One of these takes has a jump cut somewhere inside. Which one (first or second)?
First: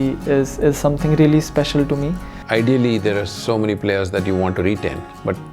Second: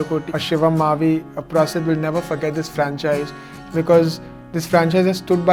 first